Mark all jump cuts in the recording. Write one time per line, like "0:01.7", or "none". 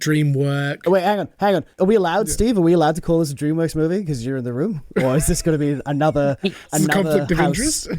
0:04.8